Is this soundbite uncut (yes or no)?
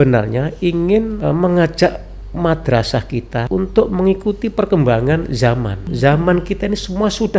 no